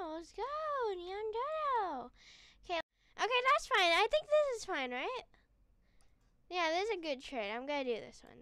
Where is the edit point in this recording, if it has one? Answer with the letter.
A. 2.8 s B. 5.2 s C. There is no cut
A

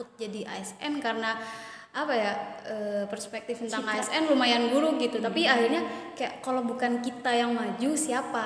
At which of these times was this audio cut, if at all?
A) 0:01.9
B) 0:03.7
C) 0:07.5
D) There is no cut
D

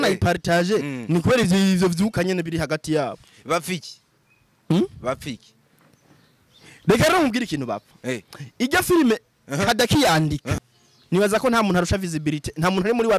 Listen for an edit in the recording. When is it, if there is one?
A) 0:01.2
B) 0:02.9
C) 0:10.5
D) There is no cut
C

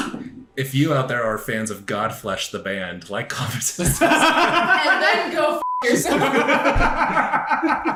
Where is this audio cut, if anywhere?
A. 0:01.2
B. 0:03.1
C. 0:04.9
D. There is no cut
D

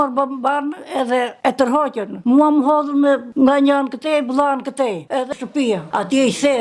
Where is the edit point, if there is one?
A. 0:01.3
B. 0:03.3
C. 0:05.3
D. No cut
C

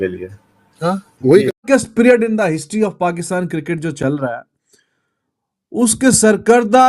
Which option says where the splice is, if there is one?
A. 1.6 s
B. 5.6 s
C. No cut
A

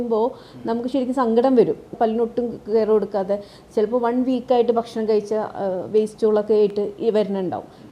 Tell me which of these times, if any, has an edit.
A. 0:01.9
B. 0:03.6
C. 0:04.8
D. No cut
A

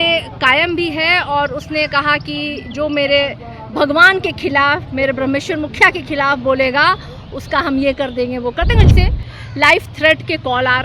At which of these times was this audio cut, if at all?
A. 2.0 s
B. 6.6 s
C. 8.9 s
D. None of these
C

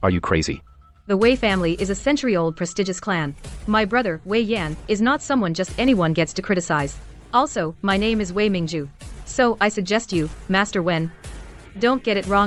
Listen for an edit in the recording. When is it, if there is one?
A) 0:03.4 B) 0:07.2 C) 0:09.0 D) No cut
D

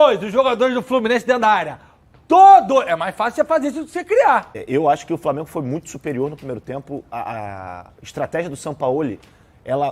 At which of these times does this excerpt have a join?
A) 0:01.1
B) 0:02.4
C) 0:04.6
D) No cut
C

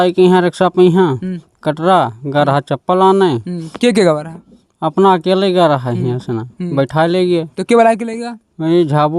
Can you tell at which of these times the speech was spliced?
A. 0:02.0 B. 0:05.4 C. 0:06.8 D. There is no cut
D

